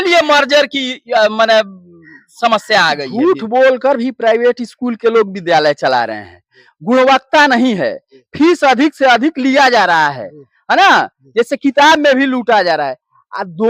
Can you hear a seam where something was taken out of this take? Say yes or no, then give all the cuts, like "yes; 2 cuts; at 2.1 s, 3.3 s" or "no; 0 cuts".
yes; 1 cut; at 3.1 s